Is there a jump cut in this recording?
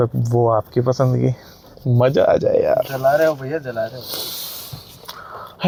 no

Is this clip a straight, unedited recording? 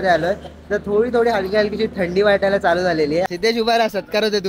no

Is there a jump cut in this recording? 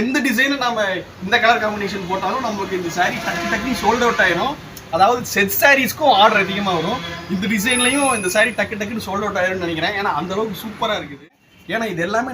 yes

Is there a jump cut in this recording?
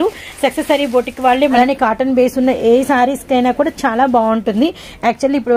yes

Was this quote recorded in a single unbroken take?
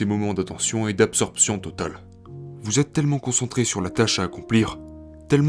yes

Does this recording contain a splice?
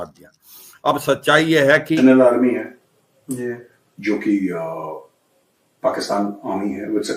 yes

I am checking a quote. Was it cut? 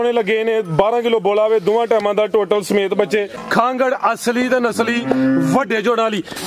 yes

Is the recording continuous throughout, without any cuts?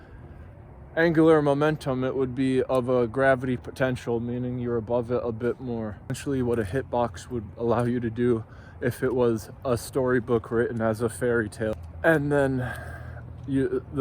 no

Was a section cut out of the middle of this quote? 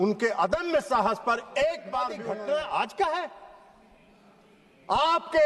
yes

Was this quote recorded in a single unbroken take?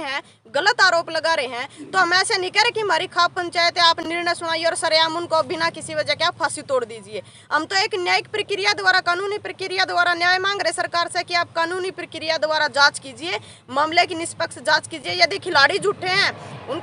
yes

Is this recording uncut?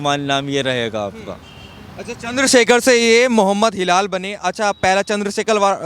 yes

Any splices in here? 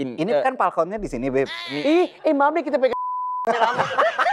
no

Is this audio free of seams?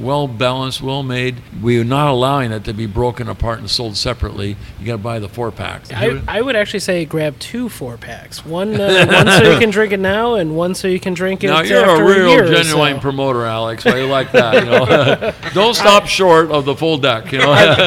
no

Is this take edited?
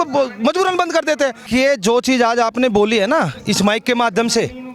yes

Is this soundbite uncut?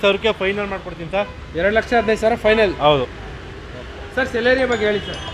yes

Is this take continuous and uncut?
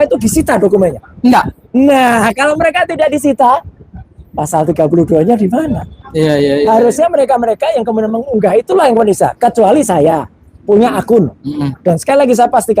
yes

